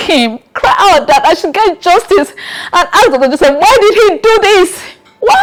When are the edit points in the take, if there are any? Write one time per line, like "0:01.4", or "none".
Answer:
none